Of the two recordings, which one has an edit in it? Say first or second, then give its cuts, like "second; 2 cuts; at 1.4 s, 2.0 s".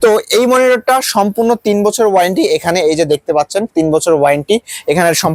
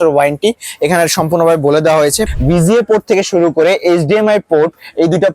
second; 1 cut; at 2.3 s